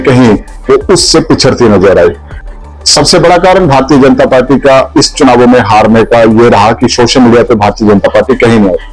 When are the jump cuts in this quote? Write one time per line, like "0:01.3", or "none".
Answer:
none